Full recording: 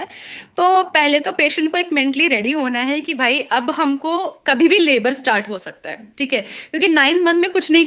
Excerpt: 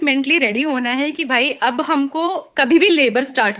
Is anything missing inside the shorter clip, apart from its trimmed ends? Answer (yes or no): no